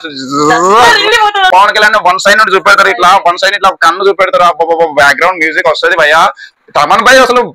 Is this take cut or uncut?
cut